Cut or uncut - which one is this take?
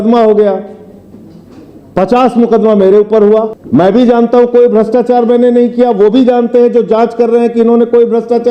cut